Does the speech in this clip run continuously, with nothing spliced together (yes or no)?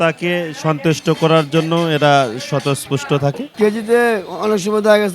no